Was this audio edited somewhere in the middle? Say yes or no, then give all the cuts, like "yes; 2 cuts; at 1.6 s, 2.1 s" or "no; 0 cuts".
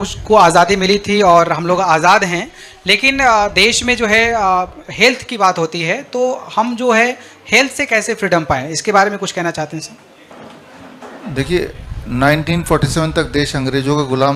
no; 0 cuts